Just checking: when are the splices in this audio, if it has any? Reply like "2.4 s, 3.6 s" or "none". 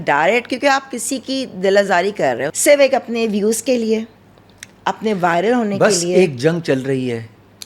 2.5 s